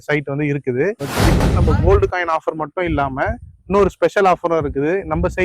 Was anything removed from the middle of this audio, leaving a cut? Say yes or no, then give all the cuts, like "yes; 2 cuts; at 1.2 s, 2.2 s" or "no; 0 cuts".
yes; 1 cut; at 1.4 s